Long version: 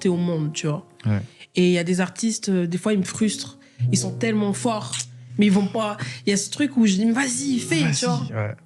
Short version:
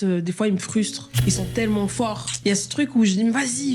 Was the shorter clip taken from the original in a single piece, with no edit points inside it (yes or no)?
no